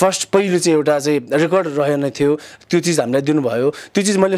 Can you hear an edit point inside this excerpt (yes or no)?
no